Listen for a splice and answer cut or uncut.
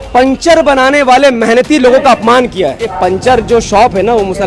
cut